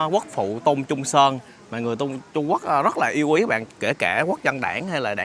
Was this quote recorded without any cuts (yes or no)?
yes